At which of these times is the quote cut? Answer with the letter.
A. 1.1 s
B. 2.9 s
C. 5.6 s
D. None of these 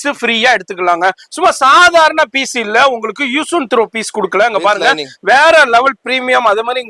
D